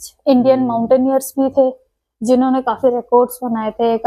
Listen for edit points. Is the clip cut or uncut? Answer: uncut